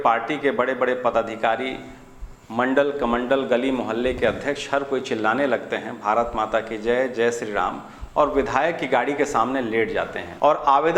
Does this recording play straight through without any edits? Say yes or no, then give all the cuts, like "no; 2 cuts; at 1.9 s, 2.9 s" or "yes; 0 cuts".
yes; 0 cuts